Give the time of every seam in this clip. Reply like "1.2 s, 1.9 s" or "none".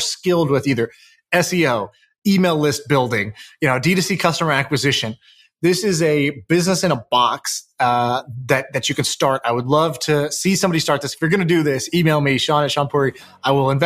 none